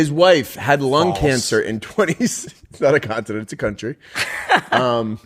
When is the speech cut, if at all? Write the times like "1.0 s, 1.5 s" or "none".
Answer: none